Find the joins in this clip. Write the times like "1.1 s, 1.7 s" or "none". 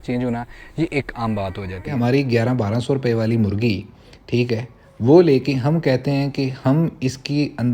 1.9 s